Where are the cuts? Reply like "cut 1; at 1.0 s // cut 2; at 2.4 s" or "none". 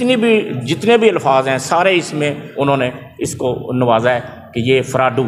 none